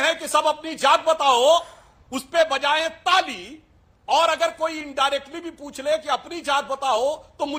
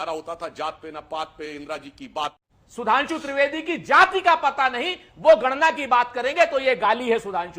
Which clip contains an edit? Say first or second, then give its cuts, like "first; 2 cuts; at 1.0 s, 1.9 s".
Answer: second; 1 cut; at 2.4 s